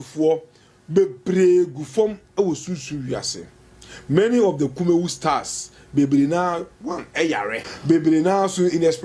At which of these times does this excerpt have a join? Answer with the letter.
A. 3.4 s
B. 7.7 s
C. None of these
B